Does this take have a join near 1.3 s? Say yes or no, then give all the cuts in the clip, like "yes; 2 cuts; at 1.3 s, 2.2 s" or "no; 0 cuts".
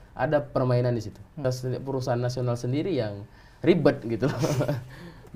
yes; 1 cut; at 1.3 s